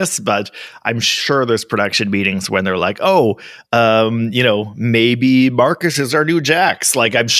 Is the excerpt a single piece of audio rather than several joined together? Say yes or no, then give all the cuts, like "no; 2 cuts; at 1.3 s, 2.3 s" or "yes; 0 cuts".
yes; 0 cuts